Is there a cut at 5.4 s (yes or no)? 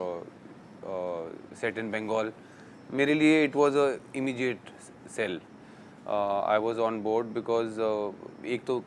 no